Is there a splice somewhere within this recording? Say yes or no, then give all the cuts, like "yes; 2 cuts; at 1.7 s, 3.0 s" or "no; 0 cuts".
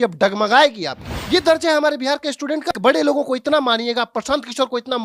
yes; 2 cuts; at 1.1 s, 2.7 s